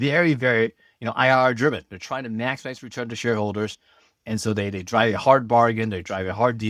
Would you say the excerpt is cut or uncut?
uncut